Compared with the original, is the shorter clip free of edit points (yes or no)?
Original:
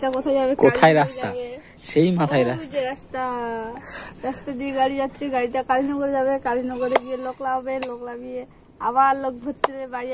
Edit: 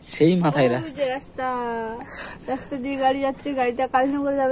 yes